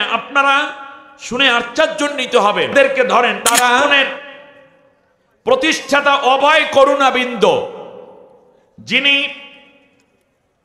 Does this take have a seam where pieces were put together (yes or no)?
yes